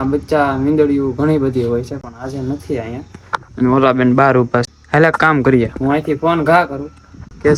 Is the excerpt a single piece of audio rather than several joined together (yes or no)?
yes